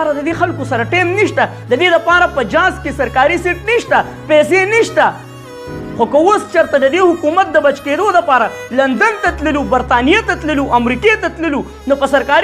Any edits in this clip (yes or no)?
no